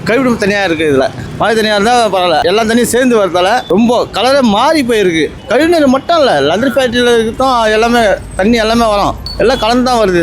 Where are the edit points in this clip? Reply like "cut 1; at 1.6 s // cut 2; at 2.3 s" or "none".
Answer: cut 1; at 1.2 s // cut 2; at 2.4 s // cut 3; at 3.6 s // cut 4; at 5.4 s // cut 5; at 9.2 s